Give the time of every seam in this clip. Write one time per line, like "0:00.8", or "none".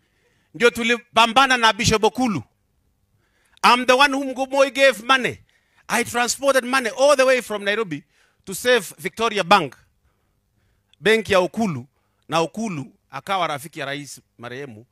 none